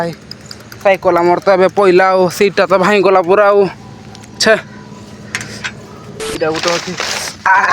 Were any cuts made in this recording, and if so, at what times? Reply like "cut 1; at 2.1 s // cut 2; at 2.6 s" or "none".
cut 1; at 6.2 s